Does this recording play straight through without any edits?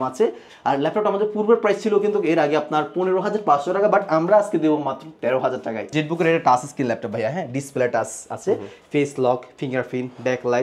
no; 1 cut; at 5.9 s

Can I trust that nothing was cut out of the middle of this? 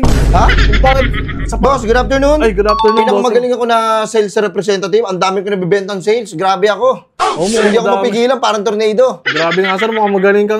yes; 0 cuts

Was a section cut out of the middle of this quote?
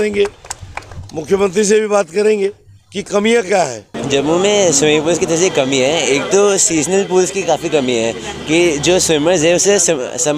yes; 1 cut; at 3.9 s

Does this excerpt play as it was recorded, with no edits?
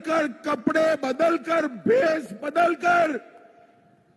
yes; 0 cuts

